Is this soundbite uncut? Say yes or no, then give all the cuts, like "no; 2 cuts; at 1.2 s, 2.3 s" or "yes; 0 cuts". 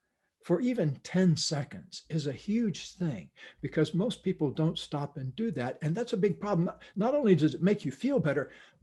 yes; 0 cuts